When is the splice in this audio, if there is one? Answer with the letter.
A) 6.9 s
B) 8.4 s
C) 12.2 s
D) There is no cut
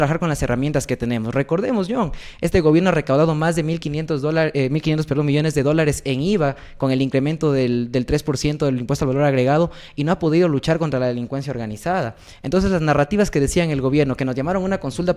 D